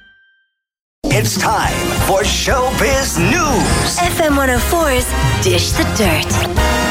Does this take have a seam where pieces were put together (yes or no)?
yes